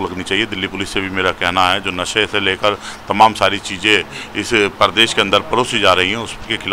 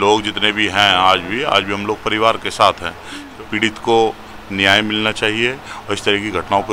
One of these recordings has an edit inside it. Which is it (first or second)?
second